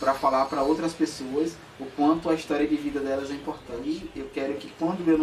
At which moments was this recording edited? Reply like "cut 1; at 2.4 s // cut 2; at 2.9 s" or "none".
cut 1; at 3.8 s